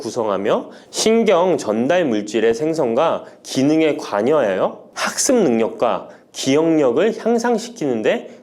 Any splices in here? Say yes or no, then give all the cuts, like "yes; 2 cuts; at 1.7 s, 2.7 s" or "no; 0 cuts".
no; 0 cuts